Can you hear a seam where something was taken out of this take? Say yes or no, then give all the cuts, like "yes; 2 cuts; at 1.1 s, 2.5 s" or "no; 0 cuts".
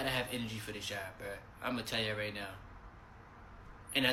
no; 0 cuts